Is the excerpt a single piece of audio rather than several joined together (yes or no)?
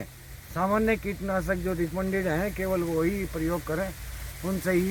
yes